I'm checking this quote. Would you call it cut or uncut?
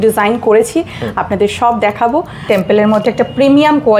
cut